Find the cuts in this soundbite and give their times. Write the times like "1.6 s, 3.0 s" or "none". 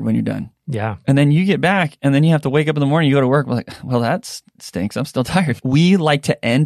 5.6 s